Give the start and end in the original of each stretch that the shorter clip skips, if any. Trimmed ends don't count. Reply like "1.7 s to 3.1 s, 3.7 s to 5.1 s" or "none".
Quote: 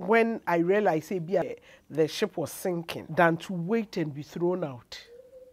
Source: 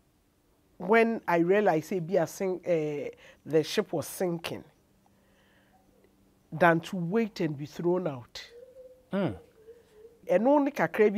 2.3 s to 3.1 s, 4.5 s to 6.4 s